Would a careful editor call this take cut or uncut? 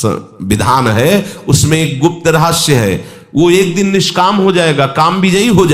uncut